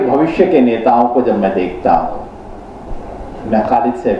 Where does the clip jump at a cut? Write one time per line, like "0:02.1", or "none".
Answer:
none